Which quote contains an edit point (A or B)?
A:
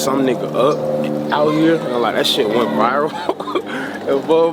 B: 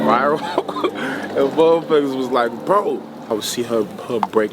B